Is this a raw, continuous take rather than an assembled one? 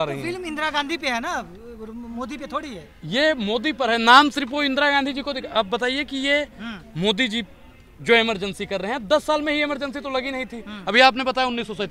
yes; 0 cuts

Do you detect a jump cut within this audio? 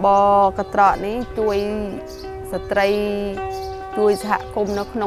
no; 0 cuts

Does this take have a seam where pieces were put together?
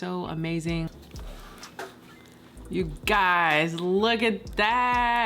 yes; 1 cut; at 1.0 s

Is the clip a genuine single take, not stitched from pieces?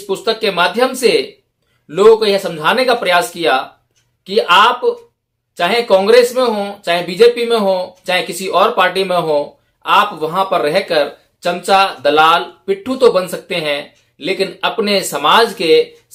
yes; 0 cuts

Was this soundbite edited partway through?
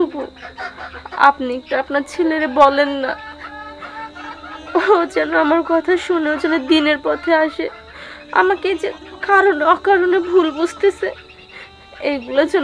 no; 0 cuts

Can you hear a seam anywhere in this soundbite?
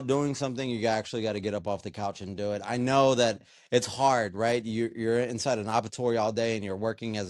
no; 0 cuts

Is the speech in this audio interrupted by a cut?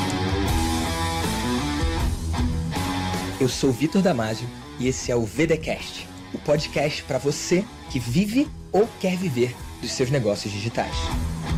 no; 0 cuts

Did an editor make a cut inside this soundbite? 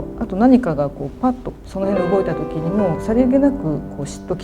yes; 1 cut; at 3.0 s

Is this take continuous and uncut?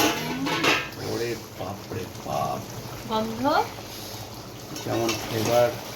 yes; 0 cuts

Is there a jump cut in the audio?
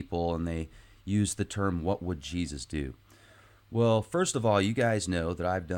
no; 0 cuts

